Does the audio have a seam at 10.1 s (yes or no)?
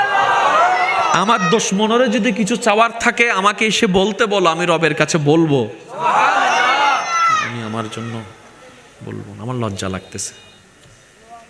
no